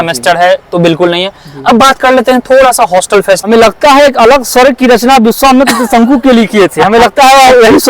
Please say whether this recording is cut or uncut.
cut